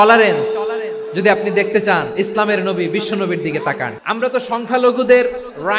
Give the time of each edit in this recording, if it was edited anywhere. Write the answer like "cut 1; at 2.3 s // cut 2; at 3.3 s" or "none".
cut 1; at 3.9 s